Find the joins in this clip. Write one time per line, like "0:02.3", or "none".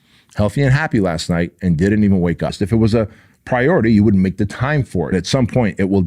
0:02.6
0:05.1